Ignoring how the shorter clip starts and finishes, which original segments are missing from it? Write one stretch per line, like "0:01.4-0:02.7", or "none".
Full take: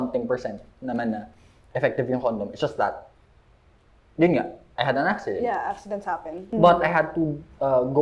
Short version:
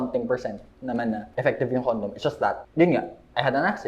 0:01.3-0:01.6
0:03.0-0:04.1